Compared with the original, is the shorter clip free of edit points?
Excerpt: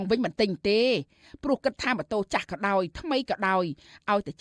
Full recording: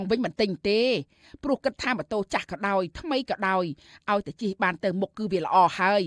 yes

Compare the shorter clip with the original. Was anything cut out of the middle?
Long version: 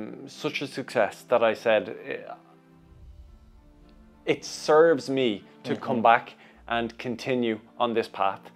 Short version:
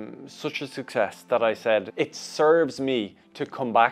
yes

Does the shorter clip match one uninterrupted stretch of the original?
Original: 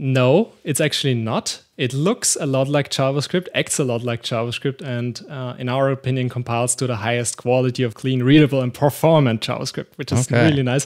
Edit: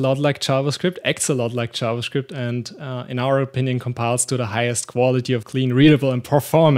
yes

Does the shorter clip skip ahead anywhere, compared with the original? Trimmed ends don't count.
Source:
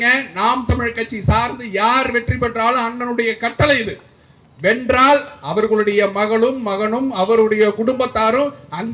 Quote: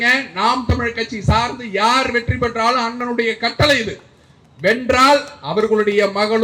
no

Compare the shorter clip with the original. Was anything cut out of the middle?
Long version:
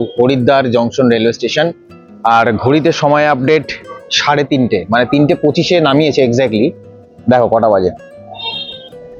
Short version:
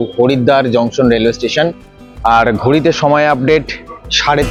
no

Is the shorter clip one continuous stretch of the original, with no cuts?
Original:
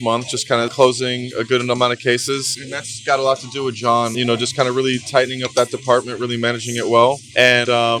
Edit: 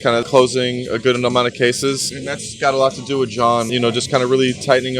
yes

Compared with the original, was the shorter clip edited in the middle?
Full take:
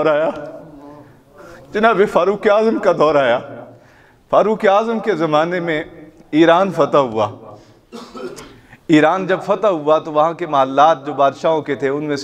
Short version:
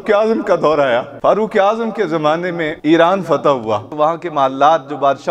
yes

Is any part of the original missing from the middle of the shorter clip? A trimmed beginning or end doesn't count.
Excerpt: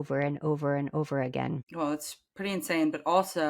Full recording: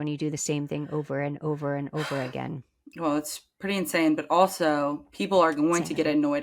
yes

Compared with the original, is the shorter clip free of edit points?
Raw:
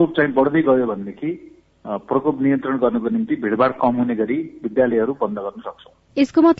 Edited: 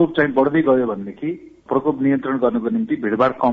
no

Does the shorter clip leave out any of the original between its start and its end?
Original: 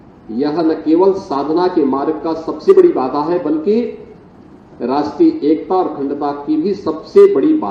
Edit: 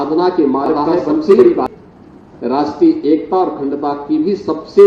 yes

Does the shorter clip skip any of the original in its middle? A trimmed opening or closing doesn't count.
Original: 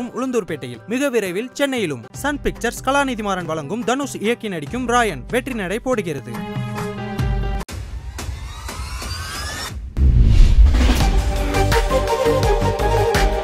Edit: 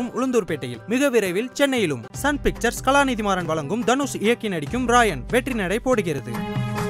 no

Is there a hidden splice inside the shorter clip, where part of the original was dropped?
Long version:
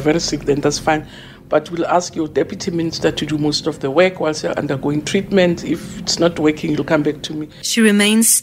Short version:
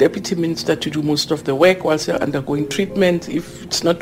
no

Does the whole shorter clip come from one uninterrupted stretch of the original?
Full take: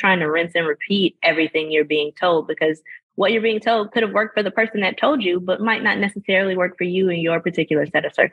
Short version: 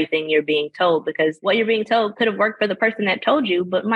no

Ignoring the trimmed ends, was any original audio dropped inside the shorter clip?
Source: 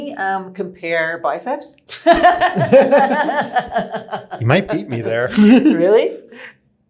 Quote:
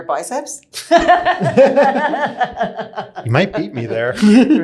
no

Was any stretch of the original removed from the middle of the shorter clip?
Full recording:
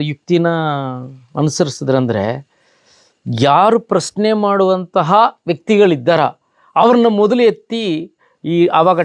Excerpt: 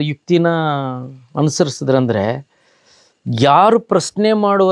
no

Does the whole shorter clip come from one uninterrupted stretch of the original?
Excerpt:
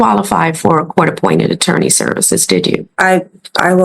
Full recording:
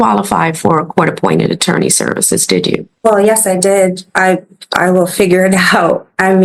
no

